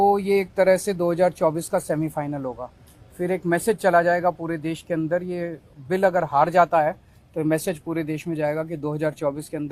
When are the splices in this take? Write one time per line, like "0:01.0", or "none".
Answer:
none